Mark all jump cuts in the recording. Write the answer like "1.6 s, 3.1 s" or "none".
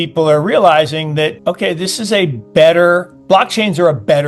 1.4 s